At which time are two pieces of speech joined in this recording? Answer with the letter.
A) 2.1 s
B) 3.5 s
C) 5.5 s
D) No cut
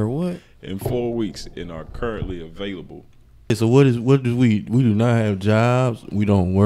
B